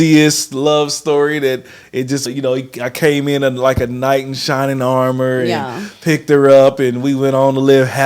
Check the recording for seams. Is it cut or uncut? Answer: cut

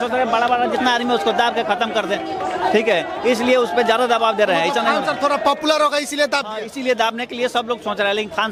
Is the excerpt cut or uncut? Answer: uncut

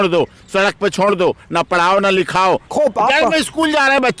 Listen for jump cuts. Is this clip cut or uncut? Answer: cut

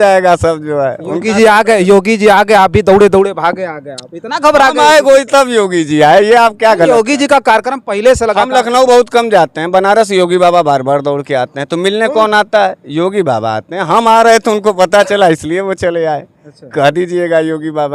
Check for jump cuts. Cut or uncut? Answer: uncut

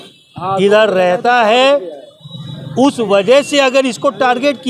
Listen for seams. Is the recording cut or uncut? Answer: uncut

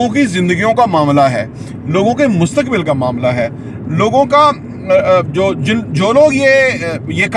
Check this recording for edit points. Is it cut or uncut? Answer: uncut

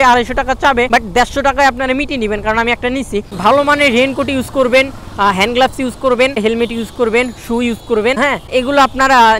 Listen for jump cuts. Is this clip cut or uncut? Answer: cut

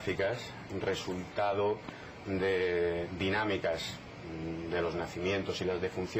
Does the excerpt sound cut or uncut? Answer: uncut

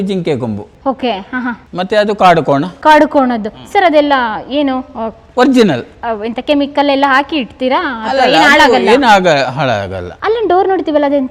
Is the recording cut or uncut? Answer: uncut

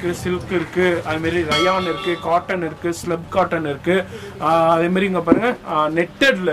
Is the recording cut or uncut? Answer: cut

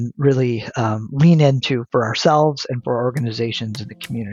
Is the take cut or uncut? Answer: uncut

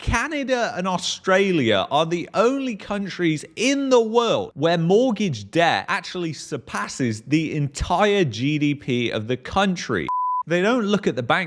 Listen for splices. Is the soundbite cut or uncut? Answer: cut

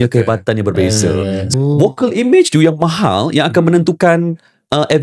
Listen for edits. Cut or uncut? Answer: cut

